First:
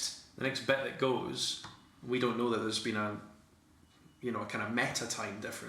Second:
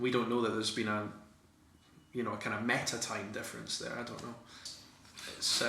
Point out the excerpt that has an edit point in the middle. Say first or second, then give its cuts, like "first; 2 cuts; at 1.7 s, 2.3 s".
second; 1 cut; at 4.6 s